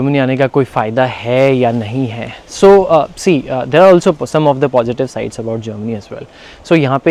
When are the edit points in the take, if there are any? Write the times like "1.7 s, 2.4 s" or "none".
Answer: none